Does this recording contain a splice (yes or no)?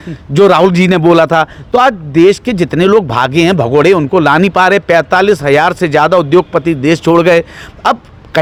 no